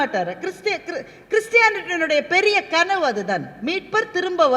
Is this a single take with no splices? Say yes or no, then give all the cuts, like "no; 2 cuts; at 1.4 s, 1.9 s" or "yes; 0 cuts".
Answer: yes; 0 cuts